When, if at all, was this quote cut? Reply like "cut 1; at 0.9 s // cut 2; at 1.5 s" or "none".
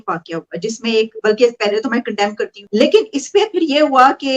cut 1; at 2.5 s